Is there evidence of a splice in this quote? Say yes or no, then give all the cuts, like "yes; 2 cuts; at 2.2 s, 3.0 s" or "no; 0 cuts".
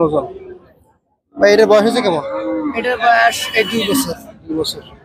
no; 0 cuts